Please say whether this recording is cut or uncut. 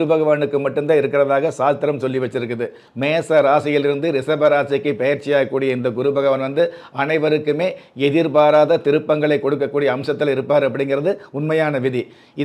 cut